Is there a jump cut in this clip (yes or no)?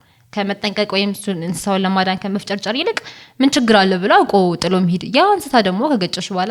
no